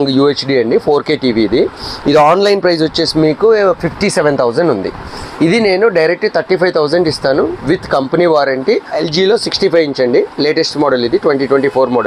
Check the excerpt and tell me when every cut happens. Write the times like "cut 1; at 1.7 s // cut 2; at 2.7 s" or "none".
cut 1; at 8.9 s